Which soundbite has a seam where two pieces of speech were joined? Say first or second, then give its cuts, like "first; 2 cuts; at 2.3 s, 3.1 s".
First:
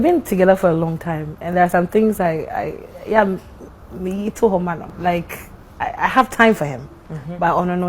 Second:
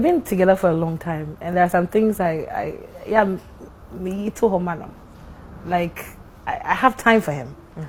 first; 1 cut; at 4.9 s